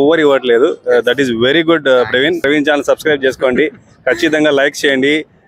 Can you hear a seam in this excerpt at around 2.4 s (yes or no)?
yes